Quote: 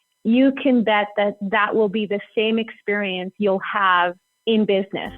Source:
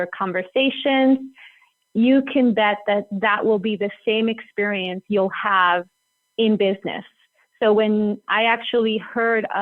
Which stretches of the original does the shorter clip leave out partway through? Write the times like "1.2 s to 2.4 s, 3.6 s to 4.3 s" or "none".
6.0 s to 6.2 s